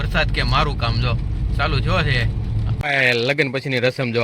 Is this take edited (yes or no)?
yes